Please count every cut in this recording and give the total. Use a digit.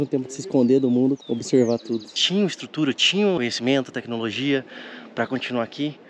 2